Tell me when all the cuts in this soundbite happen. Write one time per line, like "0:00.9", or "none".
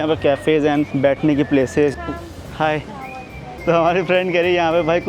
0:01.9
0:03.5